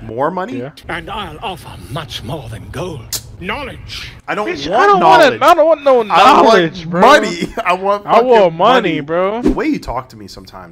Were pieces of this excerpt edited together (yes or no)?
yes